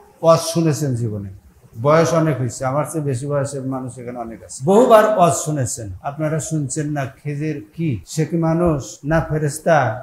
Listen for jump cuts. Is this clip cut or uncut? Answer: uncut